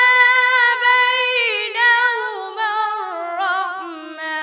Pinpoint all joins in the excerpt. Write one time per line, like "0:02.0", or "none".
none

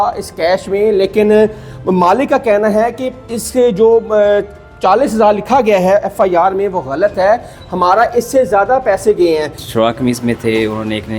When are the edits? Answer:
0:09.6

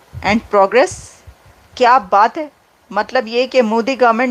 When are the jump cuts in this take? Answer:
none

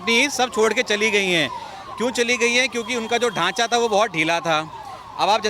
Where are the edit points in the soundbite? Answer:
none

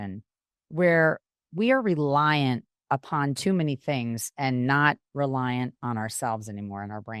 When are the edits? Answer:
none

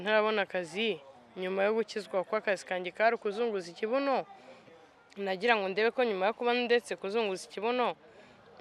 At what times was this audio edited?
none

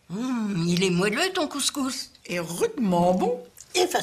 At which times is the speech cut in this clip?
0:02.1

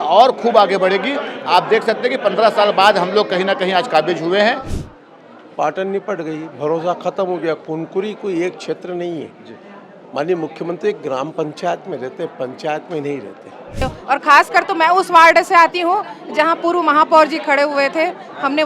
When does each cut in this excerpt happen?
0:04.7
0:13.8

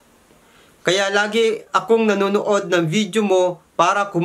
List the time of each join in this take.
none

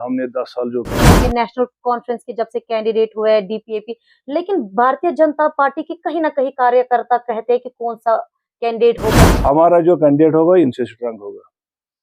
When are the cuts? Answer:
0:01.2
0:09.3

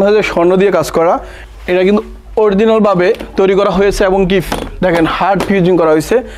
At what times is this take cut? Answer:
0:01.4

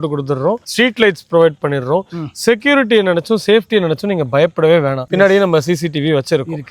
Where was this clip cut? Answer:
0:05.0

